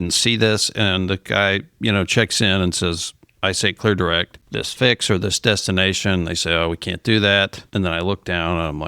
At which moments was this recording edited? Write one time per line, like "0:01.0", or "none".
0:04.4
0:07.6